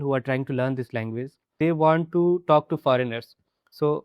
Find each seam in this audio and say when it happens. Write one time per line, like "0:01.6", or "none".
0:01.4